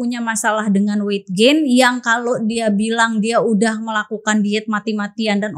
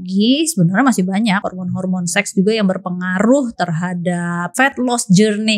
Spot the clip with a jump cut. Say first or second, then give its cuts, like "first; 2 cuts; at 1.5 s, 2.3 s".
second; 2 cuts; at 1.5 s, 4.6 s